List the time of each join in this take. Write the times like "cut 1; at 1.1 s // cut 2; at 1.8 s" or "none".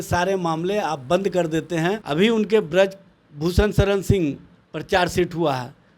cut 1; at 2.0 s